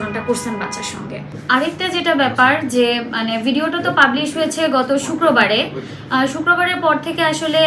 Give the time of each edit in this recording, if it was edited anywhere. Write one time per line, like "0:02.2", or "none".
none